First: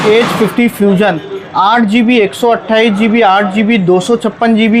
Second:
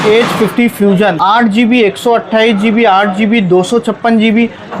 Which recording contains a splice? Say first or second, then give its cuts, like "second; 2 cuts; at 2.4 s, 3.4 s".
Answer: second; 1 cut; at 1.2 s